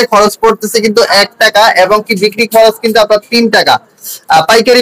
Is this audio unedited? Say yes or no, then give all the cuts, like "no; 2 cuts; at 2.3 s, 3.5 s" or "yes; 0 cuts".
yes; 0 cuts